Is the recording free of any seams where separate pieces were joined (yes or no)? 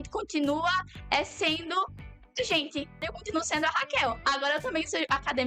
no